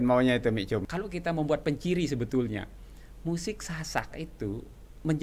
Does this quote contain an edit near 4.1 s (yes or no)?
no